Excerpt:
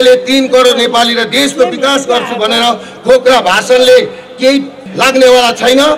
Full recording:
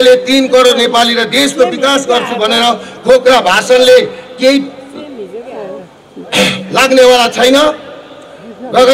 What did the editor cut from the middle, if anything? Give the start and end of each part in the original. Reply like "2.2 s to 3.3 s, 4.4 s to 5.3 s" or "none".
4.8 s to 6.6 s